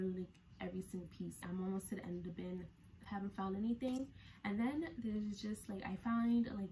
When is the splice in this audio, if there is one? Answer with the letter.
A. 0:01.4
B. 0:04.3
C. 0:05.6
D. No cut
A